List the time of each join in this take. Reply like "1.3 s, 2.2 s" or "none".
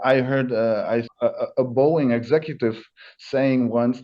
1.1 s